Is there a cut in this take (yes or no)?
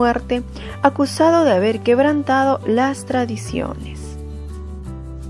yes